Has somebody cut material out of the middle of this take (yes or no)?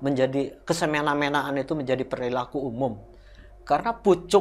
no